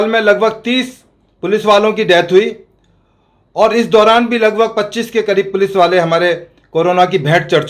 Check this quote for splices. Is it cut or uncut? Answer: uncut